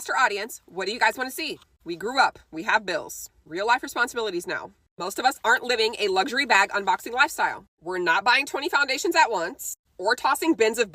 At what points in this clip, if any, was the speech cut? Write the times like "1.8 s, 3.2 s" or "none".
none

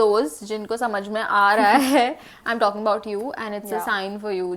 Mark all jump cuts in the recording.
none

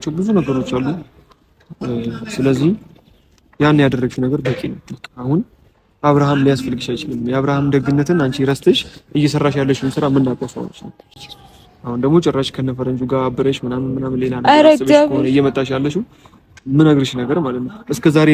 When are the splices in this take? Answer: none

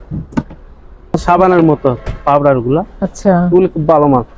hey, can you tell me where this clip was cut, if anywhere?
1.2 s

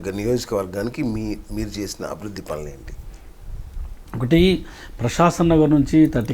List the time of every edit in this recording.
none

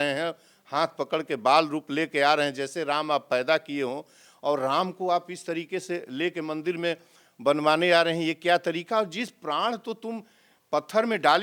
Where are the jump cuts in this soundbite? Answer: none

